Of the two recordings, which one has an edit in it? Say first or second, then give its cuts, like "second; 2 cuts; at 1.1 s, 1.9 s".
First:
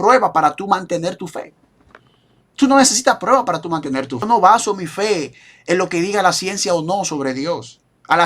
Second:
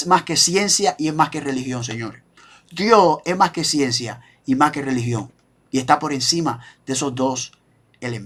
first; 1 cut; at 4.2 s